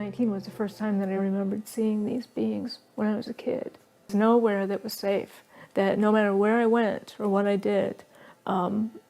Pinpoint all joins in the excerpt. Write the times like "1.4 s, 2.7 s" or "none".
4.1 s